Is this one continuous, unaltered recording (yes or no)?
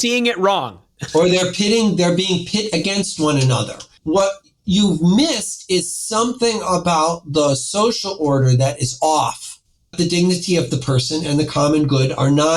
no